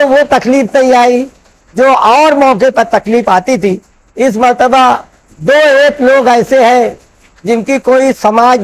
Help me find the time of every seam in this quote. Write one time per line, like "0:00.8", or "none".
none